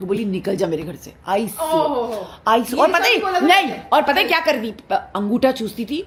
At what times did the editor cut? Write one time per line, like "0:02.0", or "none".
none